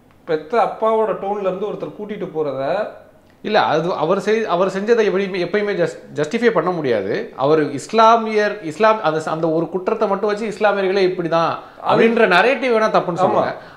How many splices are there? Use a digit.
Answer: 0